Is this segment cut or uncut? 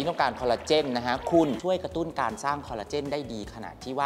cut